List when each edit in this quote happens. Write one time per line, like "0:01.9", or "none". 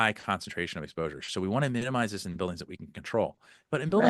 none